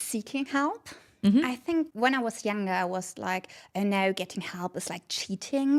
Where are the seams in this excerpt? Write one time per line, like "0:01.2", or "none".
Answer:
none